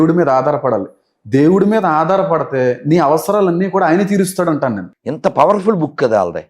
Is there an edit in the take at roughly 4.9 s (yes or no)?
yes